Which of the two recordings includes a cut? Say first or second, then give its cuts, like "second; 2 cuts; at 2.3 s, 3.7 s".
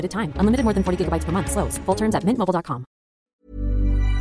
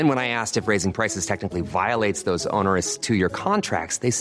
first; 1 cut; at 3.3 s